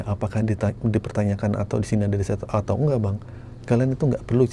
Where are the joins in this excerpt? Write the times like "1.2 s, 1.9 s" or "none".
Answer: none